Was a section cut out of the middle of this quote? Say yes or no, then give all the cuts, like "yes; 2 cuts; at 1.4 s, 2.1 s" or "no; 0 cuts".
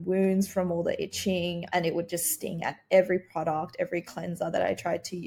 no; 0 cuts